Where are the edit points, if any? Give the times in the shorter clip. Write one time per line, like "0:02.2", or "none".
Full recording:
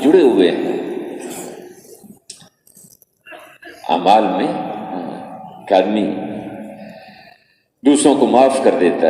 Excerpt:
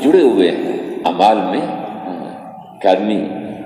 0:01.1